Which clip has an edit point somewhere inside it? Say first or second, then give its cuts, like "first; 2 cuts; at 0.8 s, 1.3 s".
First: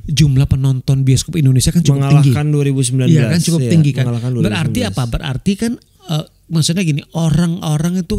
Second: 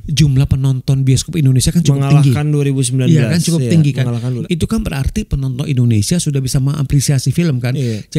second; 1 cut; at 4.4 s